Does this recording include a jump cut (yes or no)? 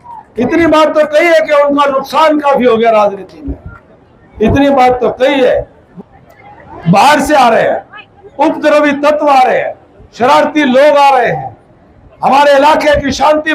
yes